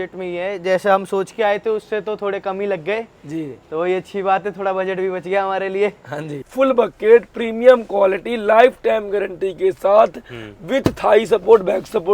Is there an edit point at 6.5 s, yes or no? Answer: yes